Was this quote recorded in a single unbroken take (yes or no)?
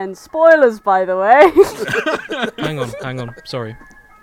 no